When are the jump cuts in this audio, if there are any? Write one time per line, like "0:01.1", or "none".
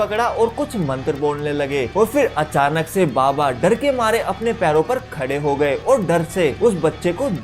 0:01.9
0:06.5